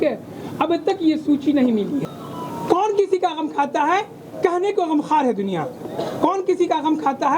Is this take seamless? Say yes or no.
no